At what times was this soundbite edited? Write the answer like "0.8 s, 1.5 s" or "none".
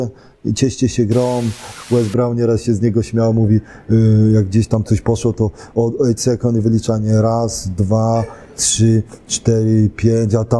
1.7 s